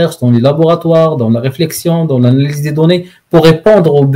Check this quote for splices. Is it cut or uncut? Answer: uncut